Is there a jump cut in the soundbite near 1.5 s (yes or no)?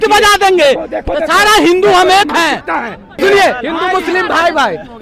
no